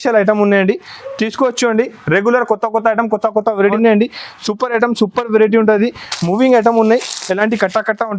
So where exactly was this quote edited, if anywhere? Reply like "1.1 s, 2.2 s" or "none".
3.7 s